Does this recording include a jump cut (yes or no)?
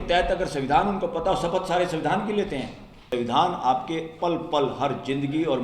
yes